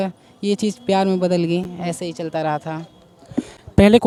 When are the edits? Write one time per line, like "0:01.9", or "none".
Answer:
none